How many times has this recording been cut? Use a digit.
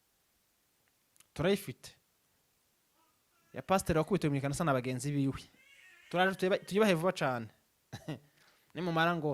0